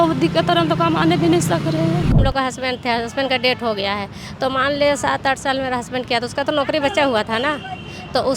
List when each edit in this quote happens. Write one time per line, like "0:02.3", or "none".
0:02.1